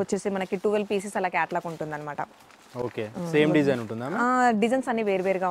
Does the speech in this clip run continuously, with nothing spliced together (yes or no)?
yes